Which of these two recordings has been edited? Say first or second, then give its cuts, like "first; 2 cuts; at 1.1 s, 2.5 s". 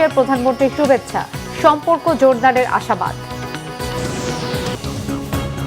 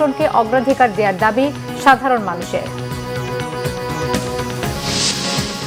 first; 1 cut; at 4.8 s